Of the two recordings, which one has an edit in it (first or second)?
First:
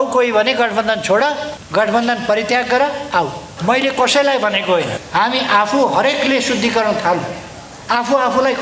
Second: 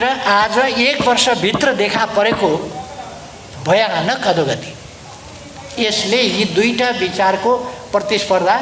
first